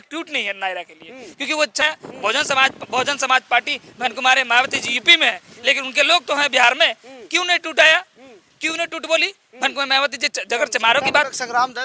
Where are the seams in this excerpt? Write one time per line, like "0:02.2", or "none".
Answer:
0:01.8